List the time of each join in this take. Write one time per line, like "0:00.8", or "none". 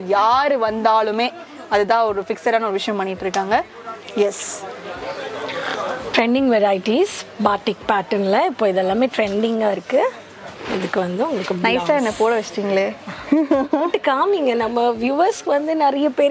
none

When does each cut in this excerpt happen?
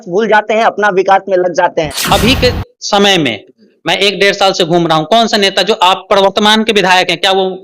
0:02.0

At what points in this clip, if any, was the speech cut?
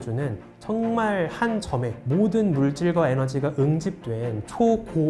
none

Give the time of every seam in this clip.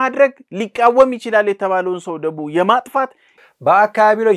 0:03.3

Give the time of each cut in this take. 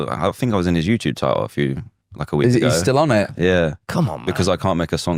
none

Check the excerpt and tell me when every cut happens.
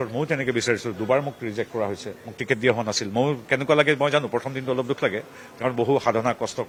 none

